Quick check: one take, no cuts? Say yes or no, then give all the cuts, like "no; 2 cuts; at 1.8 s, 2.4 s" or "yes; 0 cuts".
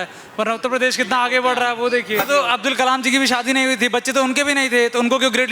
no; 1 cut; at 2.2 s